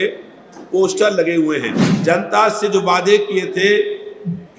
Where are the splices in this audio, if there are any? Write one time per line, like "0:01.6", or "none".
0:01.8

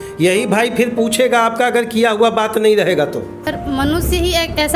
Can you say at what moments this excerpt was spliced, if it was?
0:03.5

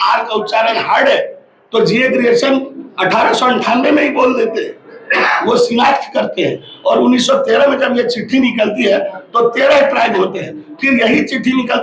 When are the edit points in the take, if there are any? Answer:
none

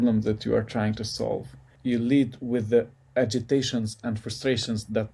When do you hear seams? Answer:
0:01.7

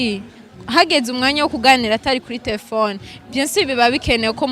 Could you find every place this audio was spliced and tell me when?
none

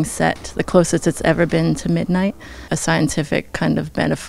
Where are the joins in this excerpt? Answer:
0:02.7

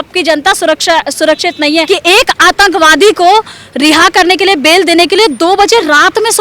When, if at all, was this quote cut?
0:01.9

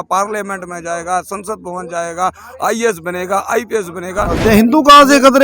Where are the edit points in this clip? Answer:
0:04.4

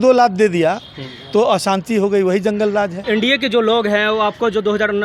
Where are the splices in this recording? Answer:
0:03.0

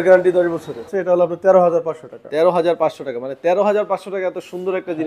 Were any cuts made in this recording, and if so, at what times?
0:00.9

